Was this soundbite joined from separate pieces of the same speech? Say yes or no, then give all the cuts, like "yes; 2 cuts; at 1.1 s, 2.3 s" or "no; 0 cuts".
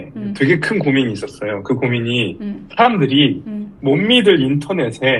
no; 0 cuts